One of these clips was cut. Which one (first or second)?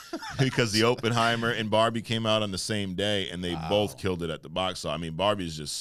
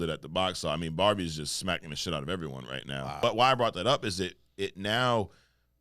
second